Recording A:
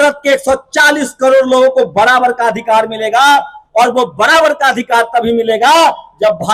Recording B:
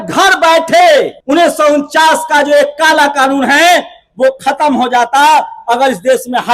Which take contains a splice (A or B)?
B